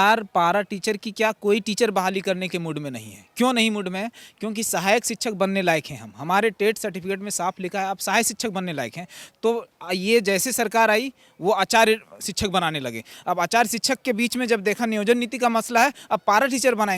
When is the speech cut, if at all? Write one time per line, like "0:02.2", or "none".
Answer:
none